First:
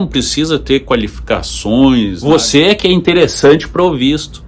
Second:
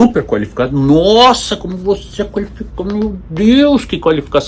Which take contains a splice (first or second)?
first